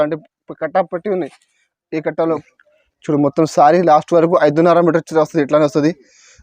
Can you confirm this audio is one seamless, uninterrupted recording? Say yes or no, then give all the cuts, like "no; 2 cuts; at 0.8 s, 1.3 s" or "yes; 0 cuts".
no; 1 cut; at 2.5 s